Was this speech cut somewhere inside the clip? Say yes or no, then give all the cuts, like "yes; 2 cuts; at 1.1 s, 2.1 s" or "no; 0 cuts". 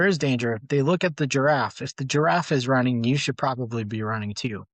no; 0 cuts